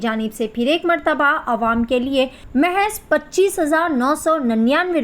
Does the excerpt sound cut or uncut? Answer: cut